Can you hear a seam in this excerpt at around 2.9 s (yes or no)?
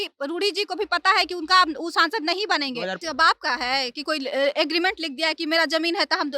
yes